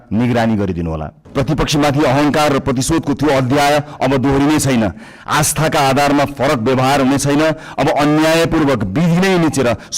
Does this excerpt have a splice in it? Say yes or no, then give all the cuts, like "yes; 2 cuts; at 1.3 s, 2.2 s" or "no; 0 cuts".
yes; 1 cut; at 1.1 s